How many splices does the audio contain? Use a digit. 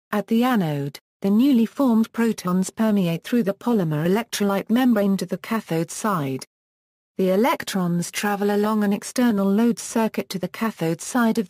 0